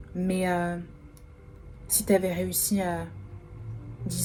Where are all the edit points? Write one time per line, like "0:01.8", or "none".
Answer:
none